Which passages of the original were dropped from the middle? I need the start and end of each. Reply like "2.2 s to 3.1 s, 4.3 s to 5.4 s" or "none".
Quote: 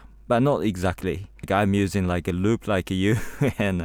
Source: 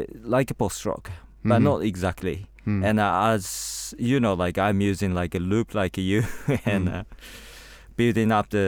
2.6 s to 4.5 s